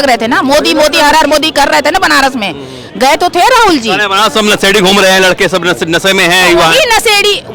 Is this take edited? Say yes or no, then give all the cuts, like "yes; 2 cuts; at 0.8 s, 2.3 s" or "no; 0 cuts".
no; 0 cuts